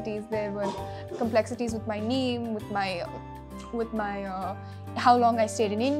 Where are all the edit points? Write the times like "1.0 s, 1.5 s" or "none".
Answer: none